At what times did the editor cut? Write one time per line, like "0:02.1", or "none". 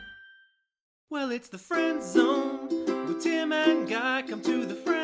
0:01.0